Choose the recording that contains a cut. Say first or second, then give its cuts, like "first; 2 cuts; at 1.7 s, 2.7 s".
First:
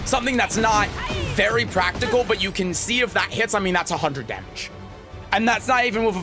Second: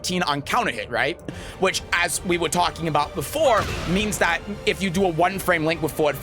second; 1 cut; at 1.4 s